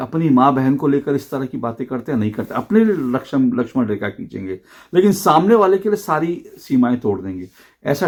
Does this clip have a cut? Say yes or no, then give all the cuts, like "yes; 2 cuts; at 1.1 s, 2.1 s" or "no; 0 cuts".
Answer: no; 0 cuts